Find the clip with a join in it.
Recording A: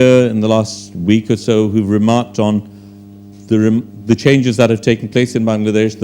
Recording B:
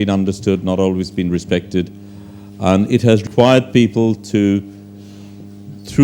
B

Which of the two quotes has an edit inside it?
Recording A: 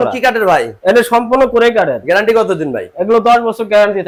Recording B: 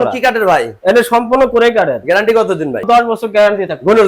B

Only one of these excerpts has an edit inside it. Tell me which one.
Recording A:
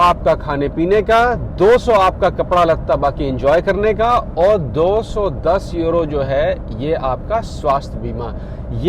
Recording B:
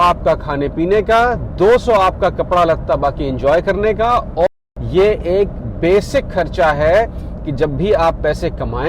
B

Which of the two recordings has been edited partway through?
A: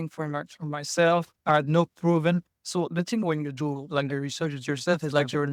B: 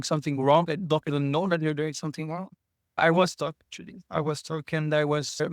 B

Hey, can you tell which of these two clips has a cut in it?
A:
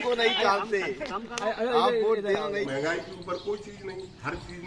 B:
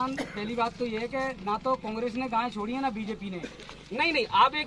A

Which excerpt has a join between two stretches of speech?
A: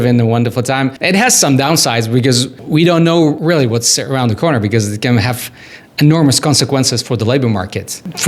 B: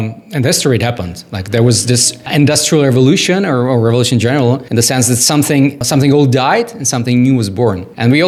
A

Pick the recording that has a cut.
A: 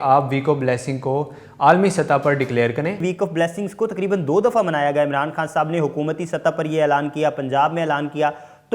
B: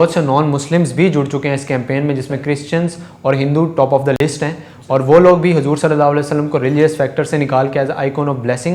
A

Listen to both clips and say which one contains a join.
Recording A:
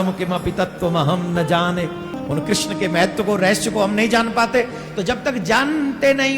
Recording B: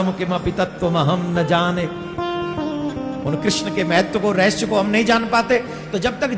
A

